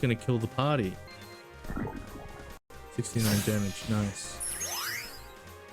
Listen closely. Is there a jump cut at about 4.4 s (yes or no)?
yes